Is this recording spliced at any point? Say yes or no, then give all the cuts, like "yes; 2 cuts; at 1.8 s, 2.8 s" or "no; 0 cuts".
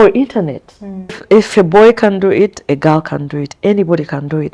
yes; 1 cut; at 1.2 s